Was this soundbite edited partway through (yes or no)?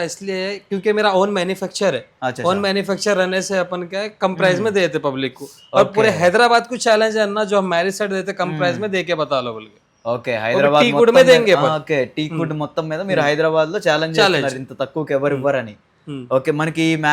no